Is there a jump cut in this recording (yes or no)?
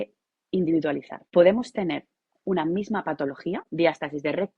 yes